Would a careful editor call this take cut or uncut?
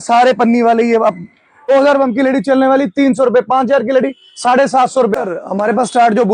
cut